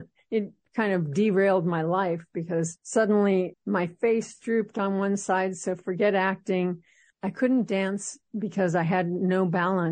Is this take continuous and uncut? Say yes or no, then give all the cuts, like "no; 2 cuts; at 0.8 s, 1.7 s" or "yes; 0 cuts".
yes; 0 cuts